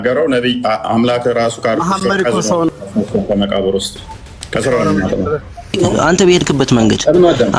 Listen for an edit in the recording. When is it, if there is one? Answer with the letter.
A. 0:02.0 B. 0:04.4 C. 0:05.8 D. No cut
C